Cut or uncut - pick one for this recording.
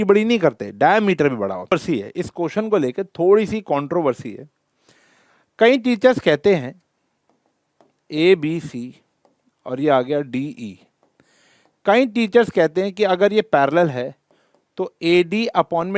cut